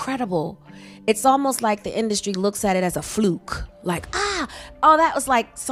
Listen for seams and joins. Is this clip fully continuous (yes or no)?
yes